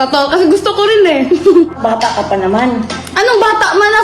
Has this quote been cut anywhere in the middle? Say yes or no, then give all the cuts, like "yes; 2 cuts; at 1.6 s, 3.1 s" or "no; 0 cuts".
yes; 1 cut; at 1.8 s